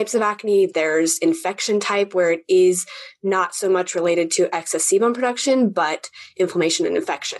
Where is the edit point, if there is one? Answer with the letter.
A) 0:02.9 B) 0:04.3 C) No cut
C